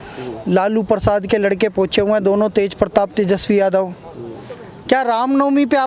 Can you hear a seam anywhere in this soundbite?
no; 0 cuts

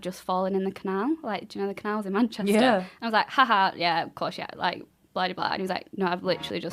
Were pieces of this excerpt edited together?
no; 0 cuts

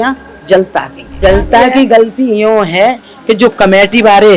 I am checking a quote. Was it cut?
yes; 1 cut; at 1.1 s

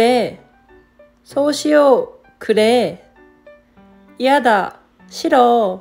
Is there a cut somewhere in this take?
no; 0 cuts

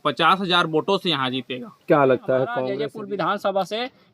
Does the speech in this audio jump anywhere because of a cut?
yes; 1 cut; at 2.7 s

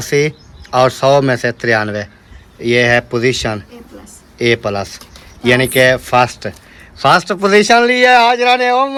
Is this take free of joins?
yes; 0 cuts

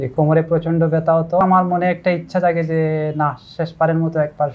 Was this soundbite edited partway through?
yes; 1 cut; at 1.4 s

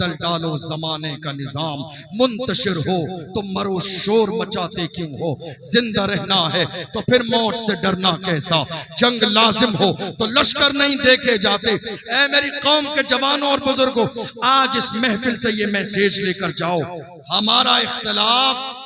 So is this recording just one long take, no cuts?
yes; 0 cuts

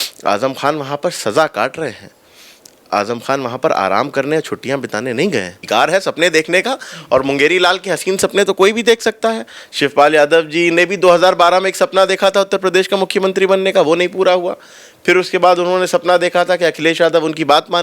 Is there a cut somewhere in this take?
yes; 1 cut; at 5.6 s

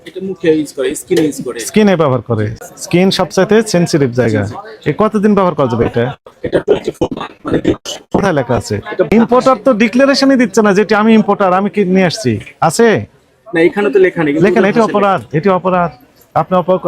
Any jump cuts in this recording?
yes; 2 cuts; at 2.6 s, 9.1 s

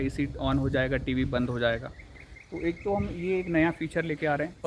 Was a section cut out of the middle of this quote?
no; 0 cuts

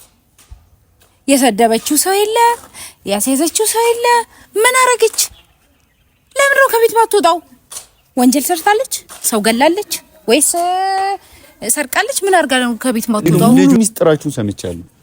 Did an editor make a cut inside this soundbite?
yes; 1 cut; at 13.3 s

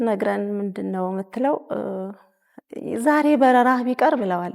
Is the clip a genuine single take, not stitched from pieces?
yes; 0 cuts

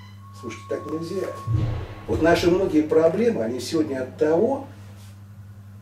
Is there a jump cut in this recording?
no; 0 cuts

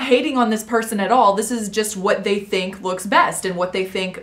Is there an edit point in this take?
no; 0 cuts

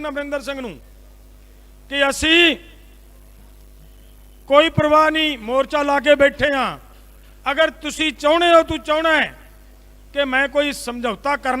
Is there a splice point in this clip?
no; 0 cuts

